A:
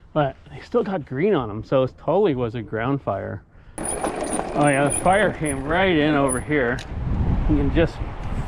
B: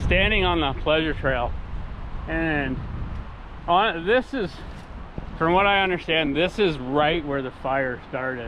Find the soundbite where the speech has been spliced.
A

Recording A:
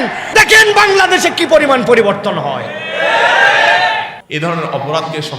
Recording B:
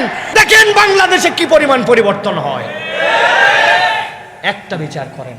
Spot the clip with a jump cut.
A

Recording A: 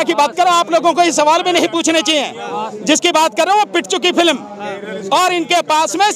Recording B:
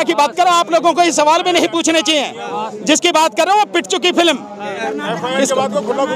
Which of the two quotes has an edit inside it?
B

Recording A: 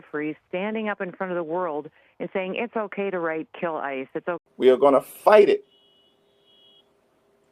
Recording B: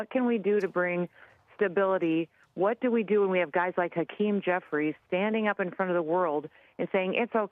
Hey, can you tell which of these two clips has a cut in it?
A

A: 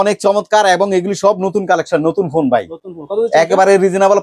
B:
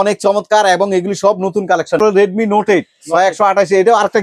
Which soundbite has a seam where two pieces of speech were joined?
B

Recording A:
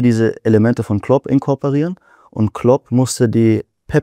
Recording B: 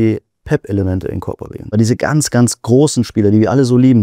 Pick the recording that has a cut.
B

